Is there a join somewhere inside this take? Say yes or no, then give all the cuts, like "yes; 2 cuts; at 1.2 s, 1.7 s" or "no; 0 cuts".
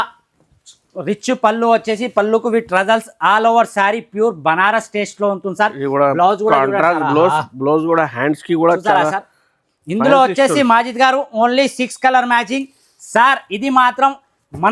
no; 0 cuts